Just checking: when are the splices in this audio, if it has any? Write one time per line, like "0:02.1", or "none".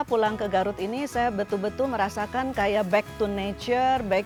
none